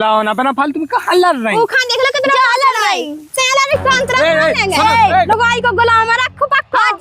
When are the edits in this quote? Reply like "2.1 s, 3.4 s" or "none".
5.3 s